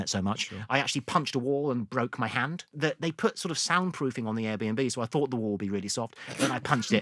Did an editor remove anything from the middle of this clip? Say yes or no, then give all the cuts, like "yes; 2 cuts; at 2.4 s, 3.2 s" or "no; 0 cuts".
yes; 1 cut; at 2.7 s